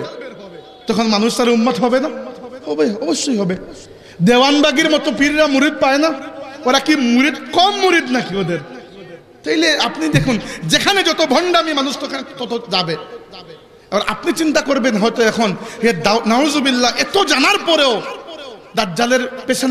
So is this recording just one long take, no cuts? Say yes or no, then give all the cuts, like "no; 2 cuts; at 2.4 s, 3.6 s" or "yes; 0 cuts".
yes; 0 cuts